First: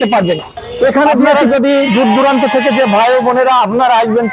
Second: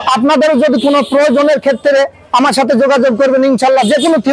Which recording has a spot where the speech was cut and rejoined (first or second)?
first